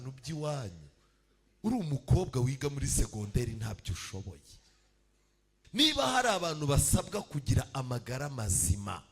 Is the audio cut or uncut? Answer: cut